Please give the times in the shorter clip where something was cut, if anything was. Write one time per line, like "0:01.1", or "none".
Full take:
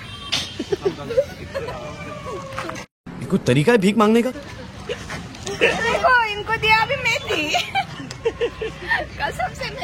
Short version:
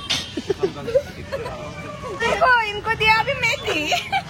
0:02.2